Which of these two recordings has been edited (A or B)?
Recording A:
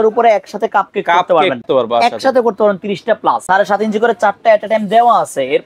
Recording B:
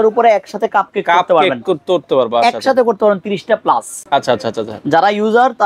A